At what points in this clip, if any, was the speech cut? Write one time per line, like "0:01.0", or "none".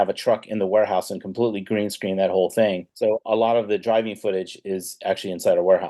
0:02.9